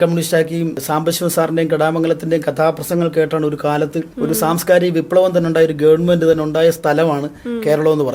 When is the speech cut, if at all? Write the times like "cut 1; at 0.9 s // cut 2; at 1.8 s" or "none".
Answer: cut 1; at 0.8 s // cut 2; at 4.0 s